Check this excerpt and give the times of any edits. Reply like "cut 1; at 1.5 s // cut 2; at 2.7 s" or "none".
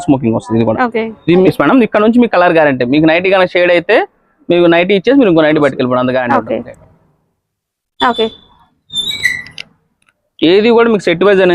cut 1; at 1.5 s // cut 2; at 6.3 s